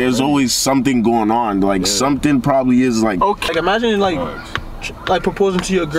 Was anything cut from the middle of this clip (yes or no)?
yes